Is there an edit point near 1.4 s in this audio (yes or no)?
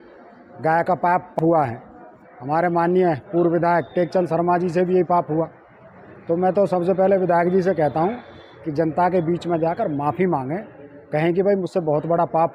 yes